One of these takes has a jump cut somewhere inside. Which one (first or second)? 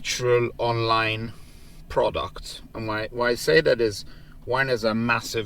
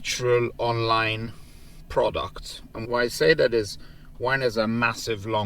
second